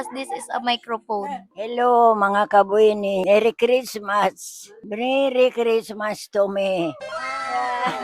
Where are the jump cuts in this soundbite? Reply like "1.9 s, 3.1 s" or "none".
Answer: 1.5 s, 3.2 s